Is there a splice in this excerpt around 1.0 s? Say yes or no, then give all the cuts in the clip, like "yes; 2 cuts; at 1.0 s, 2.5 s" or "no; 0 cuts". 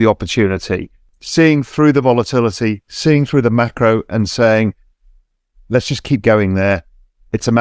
yes; 1 cut; at 1.0 s